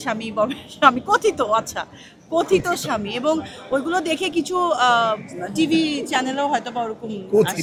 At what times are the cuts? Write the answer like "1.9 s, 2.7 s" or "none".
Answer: none

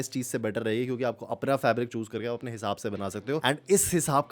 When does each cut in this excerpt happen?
3.4 s

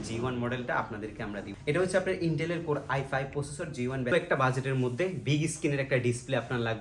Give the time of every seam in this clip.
1.5 s, 4.1 s

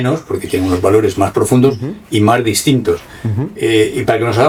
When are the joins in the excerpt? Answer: none

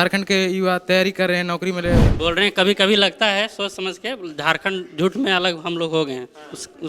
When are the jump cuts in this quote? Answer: 2.0 s

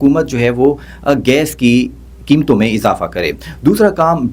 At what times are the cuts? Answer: none

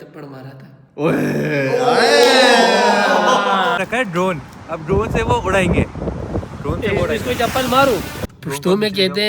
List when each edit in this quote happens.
3.8 s, 8.2 s

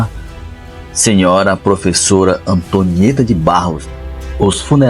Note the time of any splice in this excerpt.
3.8 s

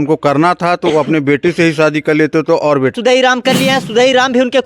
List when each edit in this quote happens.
2.9 s

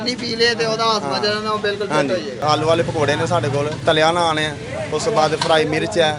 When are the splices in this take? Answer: 2.4 s, 3.7 s

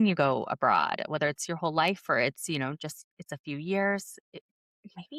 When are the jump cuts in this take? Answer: none

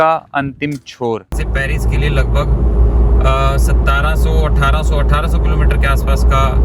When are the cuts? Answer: 1.4 s

